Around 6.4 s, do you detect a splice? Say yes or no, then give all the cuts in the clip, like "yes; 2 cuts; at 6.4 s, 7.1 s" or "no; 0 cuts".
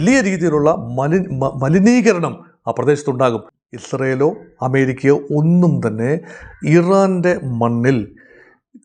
no; 1 cut; at 3.5 s